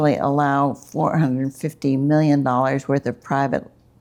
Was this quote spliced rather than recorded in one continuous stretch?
no; 0 cuts

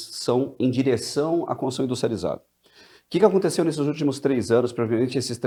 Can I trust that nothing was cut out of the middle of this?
yes; 0 cuts

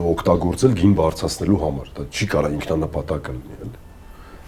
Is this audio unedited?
yes; 0 cuts

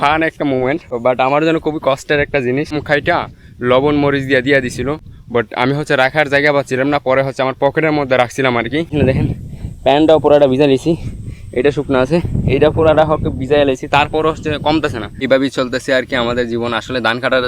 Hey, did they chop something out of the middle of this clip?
yes; 3 cuts; at 2.8 s, 8.9 s, 15.2 s

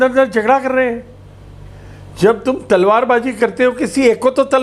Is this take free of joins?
yes; 0 cuts

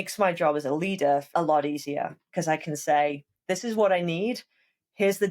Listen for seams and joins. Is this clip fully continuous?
no; 1 cut; at 1.3 s

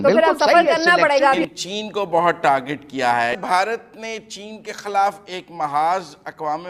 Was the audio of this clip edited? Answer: yes; 2 cuts; at 1.4 s, 3.4 s

